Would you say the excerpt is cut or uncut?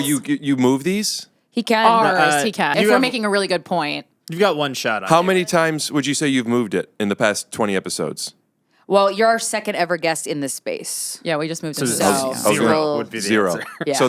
cut